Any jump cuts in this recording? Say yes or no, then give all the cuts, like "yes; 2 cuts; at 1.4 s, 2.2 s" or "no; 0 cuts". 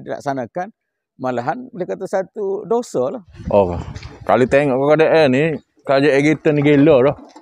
yes; 1 cut; at 3.3 s